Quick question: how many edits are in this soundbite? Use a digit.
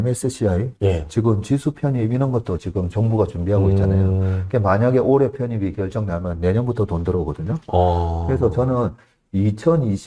0